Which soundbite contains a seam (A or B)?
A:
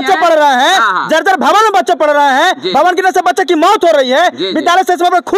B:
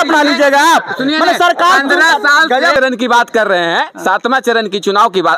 B